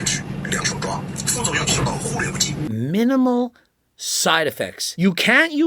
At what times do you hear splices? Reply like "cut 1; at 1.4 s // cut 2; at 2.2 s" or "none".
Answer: cut 1; at 1.1 s // cut 2; at 2.6 s // cut 3; at 4.8 s

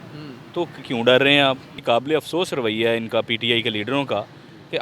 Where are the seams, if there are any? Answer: cut 1; at 1.7 s

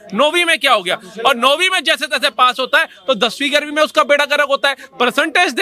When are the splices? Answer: none

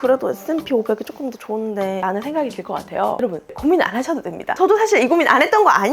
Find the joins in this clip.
cut 1; at 2.0 s // cut 2; at 3.5 s

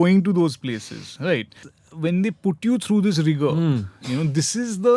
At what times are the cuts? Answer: cut 1; at 1.7 s

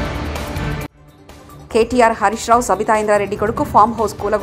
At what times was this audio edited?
cut 1; at 0.9 s

